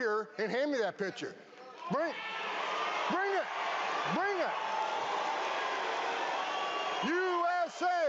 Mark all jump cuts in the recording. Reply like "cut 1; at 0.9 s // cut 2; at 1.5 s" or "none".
none